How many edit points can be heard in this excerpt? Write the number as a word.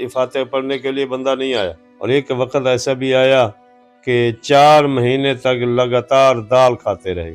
one